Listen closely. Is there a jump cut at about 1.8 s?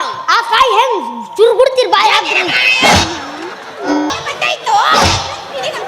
no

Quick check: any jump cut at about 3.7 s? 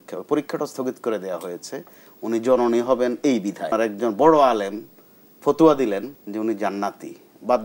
yes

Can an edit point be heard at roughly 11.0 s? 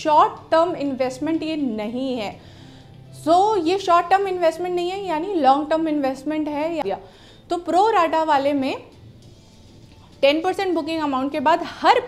no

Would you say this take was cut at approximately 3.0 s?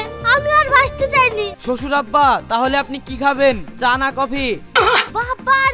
no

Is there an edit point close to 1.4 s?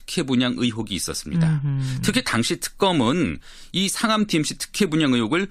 no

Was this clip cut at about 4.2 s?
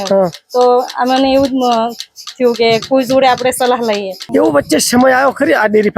yes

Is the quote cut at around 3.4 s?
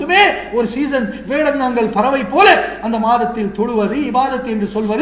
no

